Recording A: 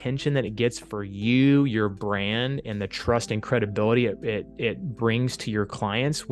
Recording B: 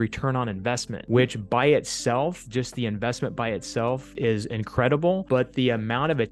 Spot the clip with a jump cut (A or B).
B